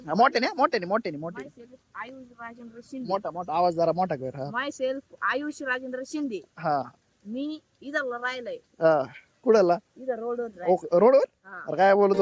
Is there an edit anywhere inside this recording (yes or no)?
no